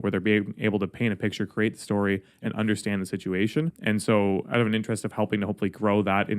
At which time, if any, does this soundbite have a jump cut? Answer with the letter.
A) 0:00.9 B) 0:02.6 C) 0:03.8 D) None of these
C